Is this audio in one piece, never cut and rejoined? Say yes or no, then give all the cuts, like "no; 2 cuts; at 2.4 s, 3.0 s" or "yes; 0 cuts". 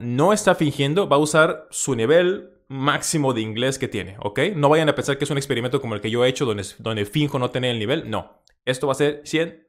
yes; 0 cuts